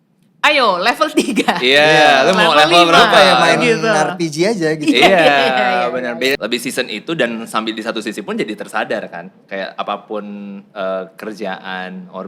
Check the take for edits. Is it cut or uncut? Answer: cut